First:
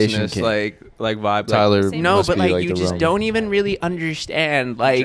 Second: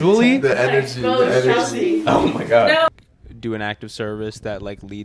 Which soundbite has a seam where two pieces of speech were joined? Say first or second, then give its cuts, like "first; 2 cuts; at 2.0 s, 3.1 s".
second; 1 cut; at 2.9 s